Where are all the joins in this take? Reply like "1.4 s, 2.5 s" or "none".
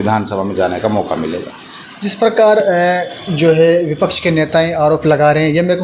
none